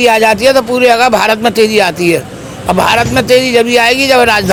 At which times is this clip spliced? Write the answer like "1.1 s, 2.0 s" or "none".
none